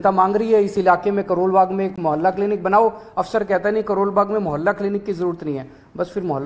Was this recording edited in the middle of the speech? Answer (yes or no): no